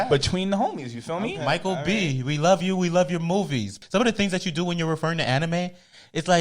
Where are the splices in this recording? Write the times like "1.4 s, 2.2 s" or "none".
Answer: 3.8 s

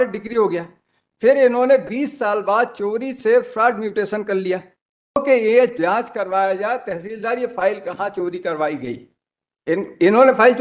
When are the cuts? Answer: 5.2 s

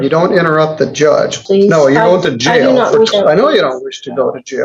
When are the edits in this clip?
1.4 s, 3.1 s

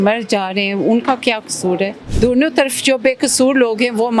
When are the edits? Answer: 2.0 s

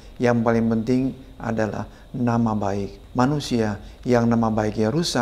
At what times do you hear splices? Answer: 3.0 s

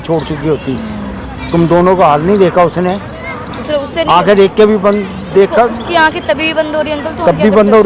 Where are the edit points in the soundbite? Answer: none

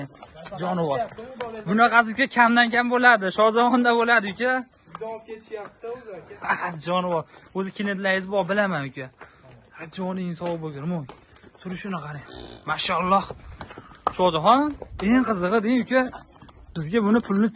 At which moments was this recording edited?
none

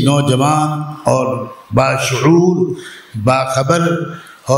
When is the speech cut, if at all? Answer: none

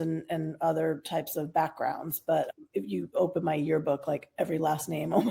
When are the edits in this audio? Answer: 2.5 s

